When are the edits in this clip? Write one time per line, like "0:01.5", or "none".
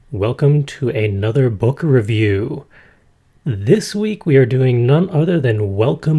0:02.3